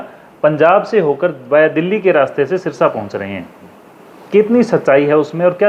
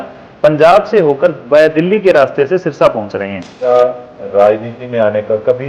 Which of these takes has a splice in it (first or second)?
second